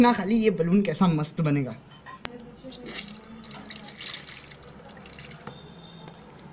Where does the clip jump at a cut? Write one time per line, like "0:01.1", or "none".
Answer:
none